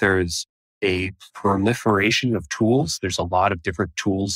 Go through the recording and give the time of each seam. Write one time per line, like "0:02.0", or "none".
0:01.1

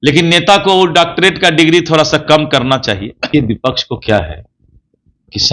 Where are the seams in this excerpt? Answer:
0:03.3

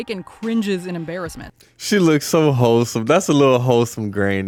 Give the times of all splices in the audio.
none

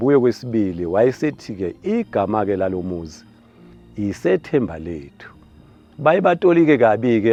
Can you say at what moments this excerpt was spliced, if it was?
none

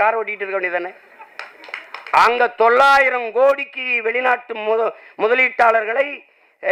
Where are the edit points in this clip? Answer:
none

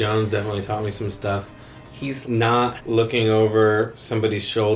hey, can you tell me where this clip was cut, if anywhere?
none

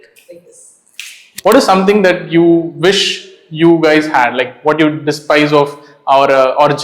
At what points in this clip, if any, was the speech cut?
0:01.2

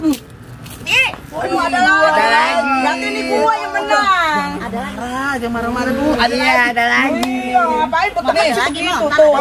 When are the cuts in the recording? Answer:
0:01.6

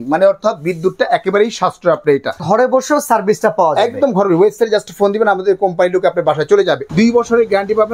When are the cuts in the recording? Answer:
0:02.4
0:06.8

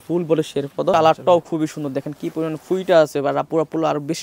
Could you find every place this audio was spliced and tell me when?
0:00.9

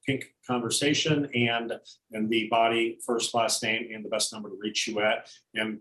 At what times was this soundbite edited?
none

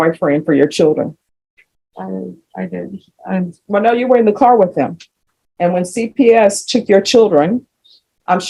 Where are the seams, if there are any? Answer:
none

